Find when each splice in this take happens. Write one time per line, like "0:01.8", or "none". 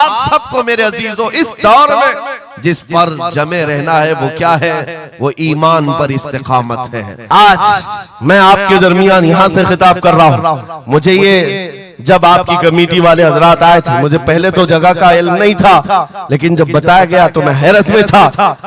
0:07.1